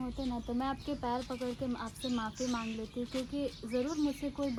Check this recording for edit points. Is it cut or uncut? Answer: uncut